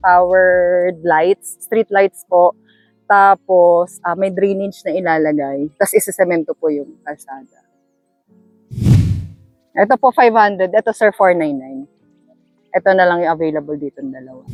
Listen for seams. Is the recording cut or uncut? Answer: uncut